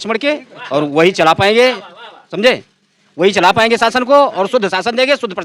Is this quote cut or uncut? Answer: uncut